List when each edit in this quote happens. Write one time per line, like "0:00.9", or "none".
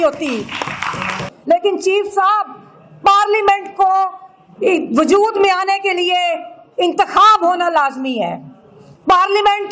0:01.3